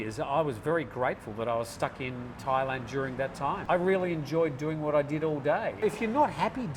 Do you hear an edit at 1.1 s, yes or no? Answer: no